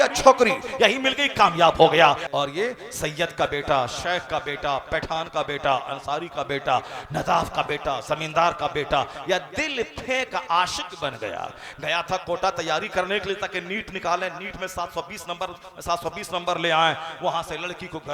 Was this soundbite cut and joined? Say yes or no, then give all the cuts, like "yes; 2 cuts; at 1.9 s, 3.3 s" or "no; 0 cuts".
yes; 1 cut; at 2.2 s